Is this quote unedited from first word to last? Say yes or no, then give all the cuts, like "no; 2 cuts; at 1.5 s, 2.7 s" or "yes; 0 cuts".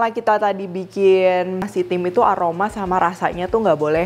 no; 1 cut; at 1.7 s